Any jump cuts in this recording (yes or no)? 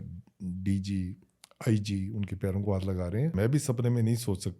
yes